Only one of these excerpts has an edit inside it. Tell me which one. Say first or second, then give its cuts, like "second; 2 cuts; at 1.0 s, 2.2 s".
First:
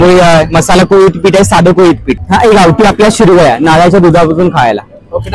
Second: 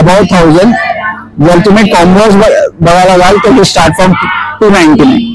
first; 1 cut; at 2.1 s